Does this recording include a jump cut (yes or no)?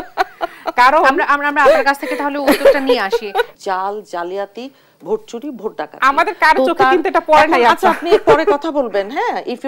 yes